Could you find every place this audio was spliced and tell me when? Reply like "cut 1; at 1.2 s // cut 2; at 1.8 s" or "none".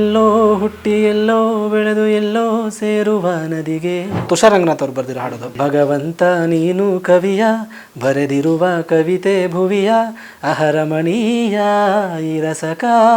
cut 1; at 4.2 s // cut 2; at 5.5 s